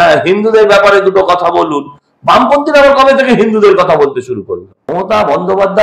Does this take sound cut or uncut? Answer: cut